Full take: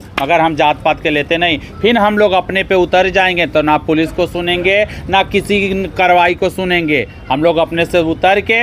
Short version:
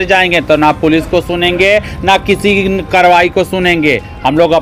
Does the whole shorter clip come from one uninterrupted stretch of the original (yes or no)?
yes